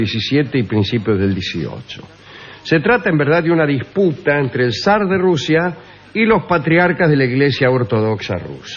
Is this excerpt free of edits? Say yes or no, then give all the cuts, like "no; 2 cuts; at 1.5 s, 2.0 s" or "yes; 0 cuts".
no; 1 cut; at 7.0 s